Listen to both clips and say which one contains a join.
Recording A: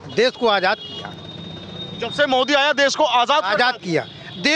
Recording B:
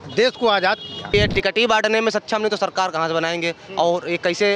B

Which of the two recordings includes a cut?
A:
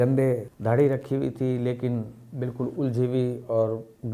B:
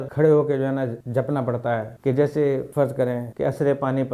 B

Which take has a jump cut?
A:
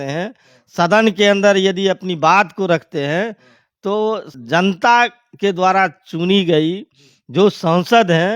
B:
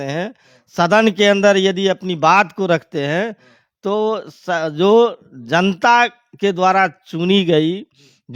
A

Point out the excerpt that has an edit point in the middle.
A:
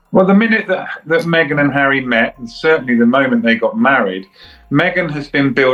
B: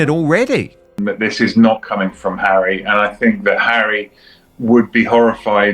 B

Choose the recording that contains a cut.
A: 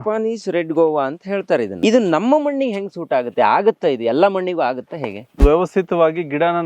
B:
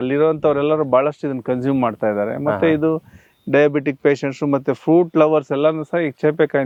A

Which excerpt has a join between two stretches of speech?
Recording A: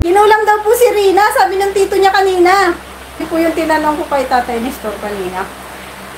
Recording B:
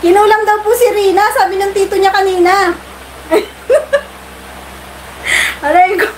A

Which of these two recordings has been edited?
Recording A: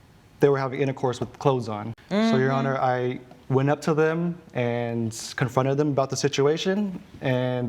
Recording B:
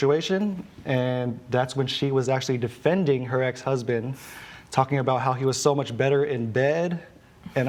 A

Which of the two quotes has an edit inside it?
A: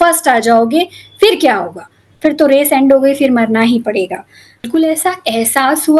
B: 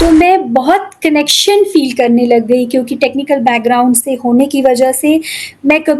A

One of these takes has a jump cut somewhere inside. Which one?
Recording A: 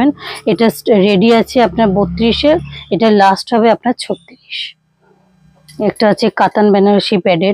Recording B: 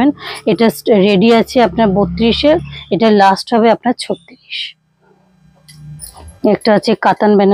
A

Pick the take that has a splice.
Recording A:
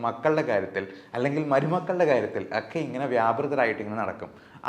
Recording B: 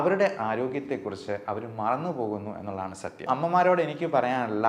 B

